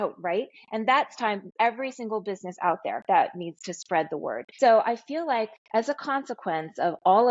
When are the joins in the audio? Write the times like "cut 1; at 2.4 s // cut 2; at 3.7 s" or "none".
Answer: cut 1; at 4.4 s